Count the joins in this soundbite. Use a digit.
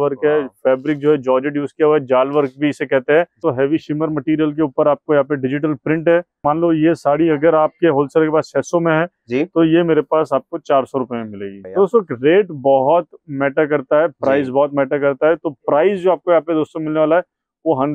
3